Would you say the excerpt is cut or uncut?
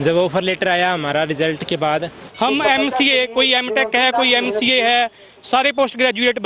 cut